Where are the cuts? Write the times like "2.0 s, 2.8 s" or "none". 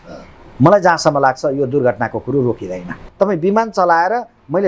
3.0 s